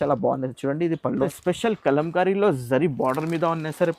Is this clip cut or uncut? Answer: cut